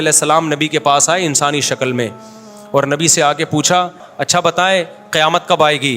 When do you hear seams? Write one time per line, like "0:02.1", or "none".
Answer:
0:04.1